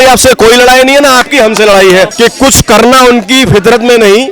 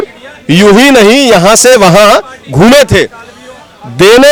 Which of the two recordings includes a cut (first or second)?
first